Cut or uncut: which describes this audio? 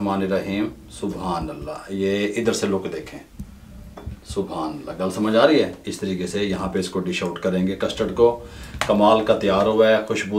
uncut